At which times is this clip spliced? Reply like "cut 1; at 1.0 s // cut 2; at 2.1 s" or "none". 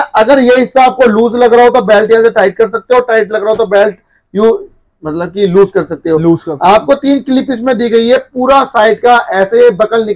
none